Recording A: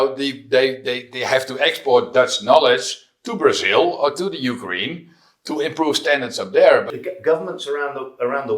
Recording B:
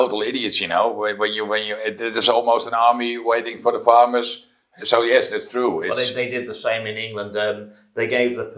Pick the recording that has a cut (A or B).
A